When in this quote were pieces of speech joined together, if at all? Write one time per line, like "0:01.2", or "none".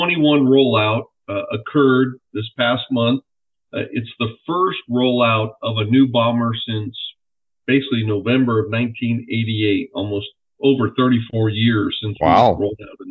none